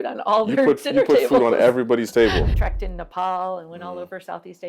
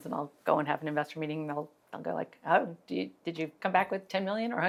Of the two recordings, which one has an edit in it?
first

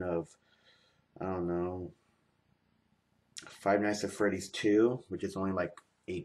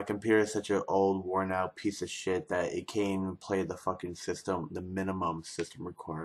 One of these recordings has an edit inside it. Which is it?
second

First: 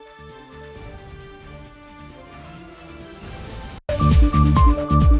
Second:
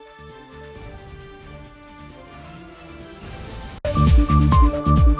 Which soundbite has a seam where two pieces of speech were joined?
first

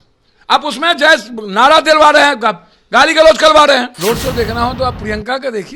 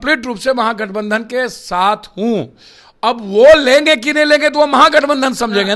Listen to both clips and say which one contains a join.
first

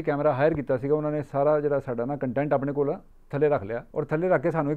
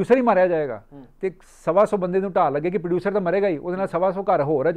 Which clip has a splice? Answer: first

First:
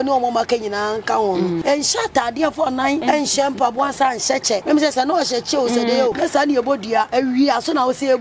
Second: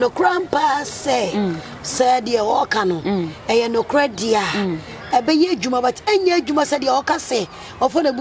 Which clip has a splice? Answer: first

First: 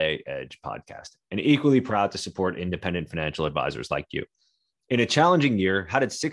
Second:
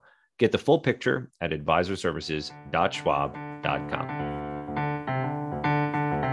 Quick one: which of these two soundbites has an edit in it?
second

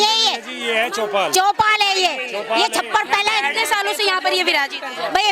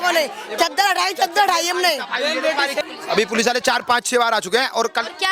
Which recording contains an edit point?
second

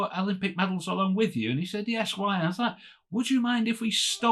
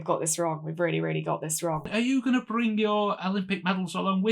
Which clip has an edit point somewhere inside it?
second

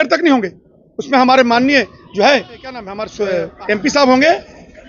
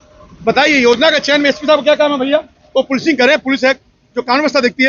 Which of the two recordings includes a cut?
first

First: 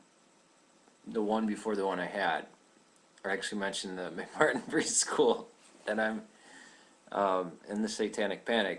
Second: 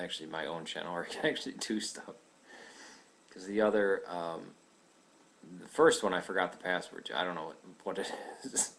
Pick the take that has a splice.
first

